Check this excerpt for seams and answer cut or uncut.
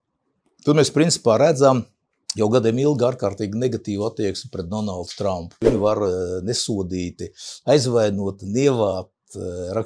cut